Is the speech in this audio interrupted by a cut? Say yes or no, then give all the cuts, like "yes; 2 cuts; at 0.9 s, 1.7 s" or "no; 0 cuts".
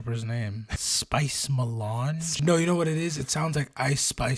yes; 2 cuts; at 0.9 s, 2.4 s